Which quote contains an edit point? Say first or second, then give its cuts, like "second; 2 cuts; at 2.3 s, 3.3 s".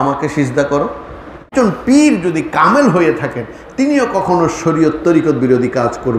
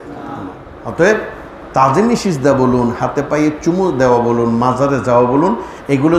first; 1 cut; at 1.5 s